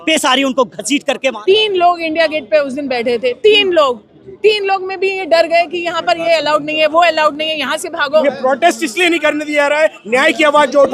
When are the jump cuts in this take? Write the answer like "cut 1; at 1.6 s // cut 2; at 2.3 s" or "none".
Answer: cut 1; at 1.4 s // cut 2; at 8.2 s

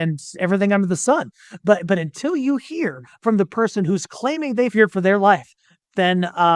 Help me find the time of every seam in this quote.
cut 1; at 4.7 s

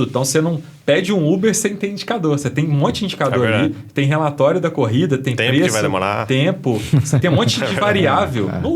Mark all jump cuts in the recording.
none

